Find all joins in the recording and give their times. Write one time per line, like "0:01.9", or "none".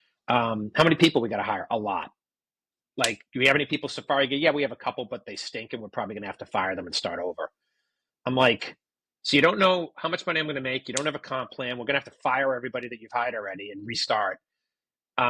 none